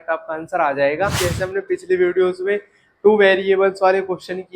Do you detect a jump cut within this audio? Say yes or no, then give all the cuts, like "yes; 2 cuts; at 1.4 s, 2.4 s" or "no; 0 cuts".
yes; 1 cut; at 1.2 s